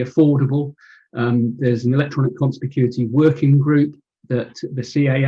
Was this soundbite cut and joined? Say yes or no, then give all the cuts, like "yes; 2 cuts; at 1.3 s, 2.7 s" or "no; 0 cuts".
yes; 1 cut; at 4.1 s